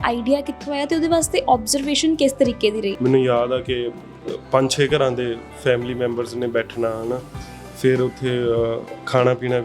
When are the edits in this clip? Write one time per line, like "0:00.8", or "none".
0:03.0